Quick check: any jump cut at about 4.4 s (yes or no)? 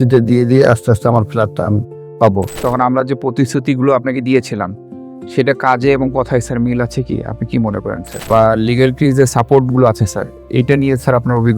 no